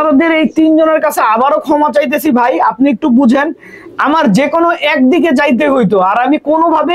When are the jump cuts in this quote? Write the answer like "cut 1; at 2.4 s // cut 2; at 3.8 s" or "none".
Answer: none